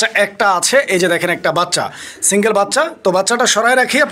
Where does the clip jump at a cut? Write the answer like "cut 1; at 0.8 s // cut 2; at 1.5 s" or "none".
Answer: none